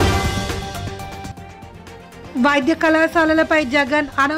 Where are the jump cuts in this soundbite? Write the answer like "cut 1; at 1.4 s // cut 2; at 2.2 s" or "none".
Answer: none